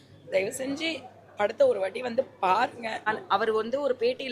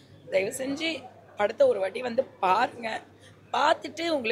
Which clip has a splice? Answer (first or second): first